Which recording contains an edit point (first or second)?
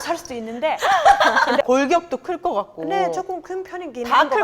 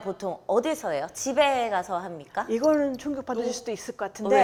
first